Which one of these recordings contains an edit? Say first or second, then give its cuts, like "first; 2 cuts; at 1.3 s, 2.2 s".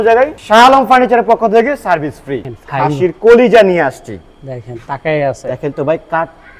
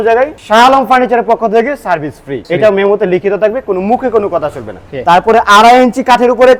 first; 1 cut; at 2.4 s